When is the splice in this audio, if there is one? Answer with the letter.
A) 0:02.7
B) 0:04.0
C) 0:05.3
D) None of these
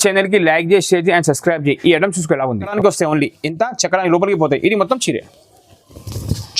A